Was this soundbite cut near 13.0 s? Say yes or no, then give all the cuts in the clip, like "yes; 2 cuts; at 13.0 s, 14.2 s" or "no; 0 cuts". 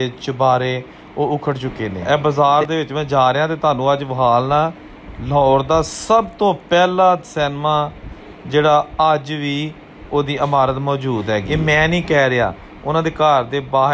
no; 2 cuts; at 2.0 s, 11.5 s